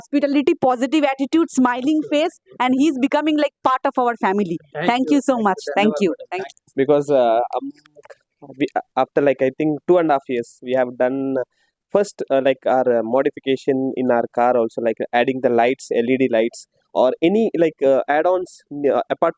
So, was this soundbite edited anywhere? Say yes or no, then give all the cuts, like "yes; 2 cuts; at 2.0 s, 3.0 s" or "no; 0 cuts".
no; 0 cuts